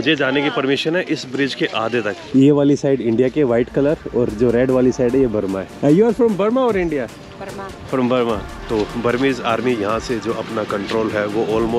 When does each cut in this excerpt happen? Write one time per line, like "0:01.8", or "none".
0:02.2
0:05.7
0:08.5